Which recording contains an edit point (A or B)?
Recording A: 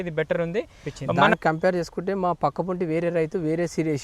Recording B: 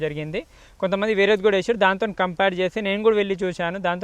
A